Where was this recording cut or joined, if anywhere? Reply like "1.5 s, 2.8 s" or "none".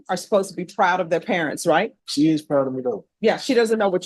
2.0 s, 3.1 s